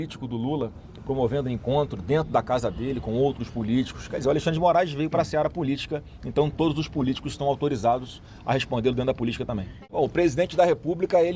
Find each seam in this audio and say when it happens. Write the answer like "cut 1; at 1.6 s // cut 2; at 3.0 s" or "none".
cut 1; at 9.8 s